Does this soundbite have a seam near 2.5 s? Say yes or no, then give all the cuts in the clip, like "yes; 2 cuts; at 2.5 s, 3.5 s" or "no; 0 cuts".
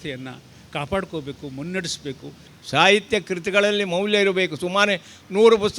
yes; 1 cut; at 2.5 s